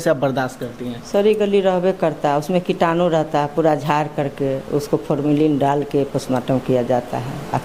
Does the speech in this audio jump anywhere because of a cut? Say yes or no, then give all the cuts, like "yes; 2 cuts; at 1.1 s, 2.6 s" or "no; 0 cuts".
no; 0 cuts